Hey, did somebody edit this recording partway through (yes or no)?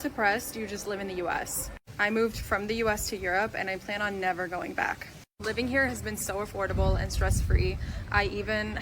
no